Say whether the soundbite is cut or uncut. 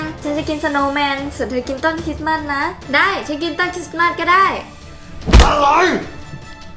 uncut